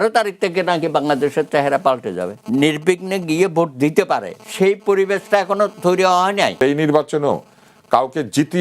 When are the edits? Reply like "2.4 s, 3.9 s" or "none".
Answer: 2.4 s, 6.5 s